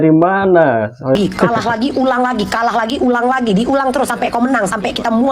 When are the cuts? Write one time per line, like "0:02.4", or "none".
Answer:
0:01.2